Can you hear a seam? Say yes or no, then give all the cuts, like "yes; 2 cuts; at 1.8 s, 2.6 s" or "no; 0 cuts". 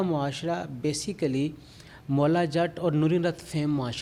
no; 0 cuts